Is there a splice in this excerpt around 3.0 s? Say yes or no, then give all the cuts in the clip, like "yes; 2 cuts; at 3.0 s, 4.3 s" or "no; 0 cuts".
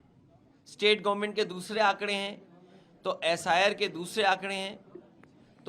no; 0 cuts